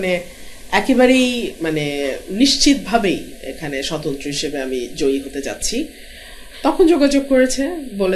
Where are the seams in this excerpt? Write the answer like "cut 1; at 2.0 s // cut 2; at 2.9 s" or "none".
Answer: none